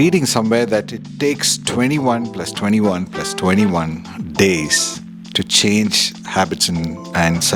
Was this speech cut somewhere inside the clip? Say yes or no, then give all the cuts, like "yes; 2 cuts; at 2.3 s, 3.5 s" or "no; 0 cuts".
no; 0 cuts